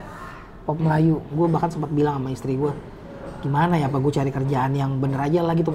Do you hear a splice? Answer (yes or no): yes